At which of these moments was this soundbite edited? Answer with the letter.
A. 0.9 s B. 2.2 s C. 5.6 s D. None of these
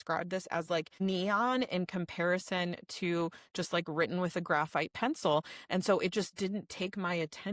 A